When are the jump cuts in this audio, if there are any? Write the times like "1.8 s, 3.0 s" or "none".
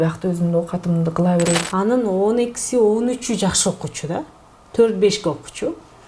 1.6 s